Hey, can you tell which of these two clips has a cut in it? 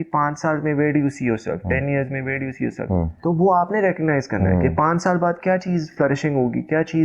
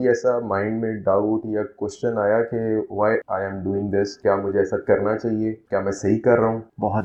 first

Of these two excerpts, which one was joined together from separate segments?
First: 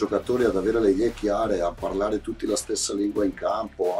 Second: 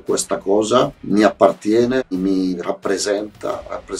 second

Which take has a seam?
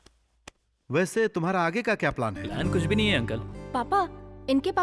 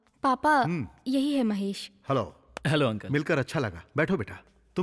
first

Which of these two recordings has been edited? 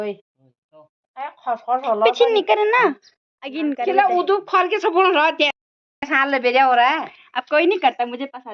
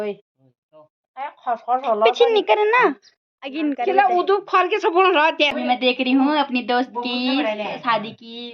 second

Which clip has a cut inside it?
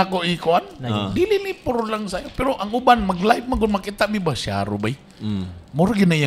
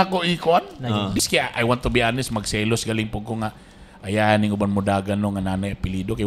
second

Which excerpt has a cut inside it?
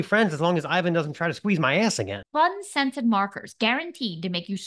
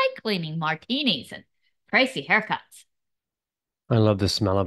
first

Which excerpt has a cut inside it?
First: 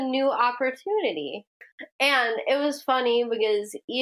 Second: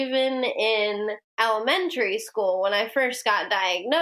second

